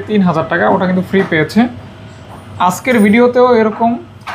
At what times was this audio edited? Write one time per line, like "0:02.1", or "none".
none